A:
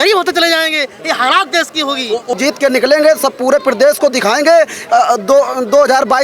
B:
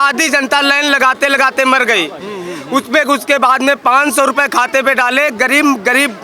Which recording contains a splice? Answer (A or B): A